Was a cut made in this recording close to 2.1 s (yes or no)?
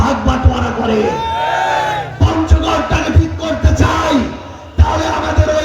yes